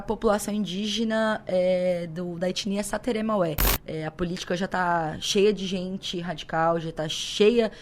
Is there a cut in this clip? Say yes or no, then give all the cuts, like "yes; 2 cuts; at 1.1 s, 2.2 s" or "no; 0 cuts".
yes; 1 cut; at 3.7 s